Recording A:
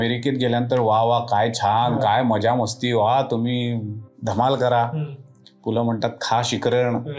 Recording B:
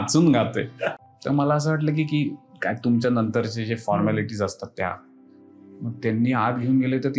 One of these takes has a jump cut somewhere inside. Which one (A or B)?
B